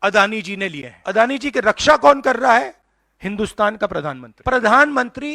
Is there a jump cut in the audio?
yes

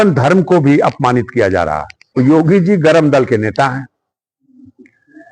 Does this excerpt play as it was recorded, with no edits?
no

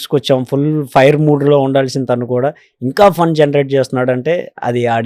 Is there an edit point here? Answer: no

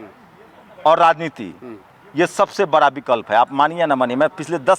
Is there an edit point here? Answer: no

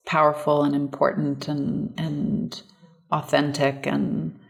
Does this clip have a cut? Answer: no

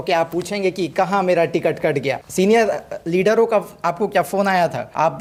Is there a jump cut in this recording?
no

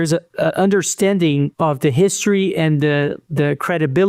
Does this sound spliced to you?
yes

